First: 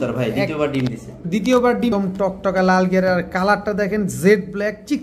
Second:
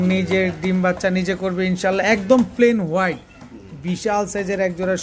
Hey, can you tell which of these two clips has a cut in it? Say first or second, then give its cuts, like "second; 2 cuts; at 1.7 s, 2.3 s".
first; 1 cut; at 1.9 s